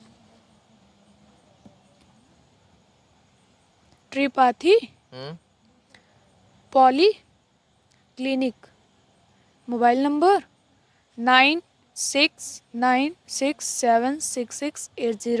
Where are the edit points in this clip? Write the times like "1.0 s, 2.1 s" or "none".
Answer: none